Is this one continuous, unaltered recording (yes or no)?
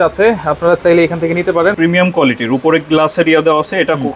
no